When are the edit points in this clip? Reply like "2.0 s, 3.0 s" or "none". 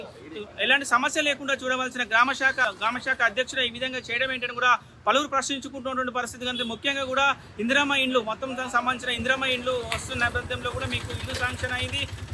2.6 s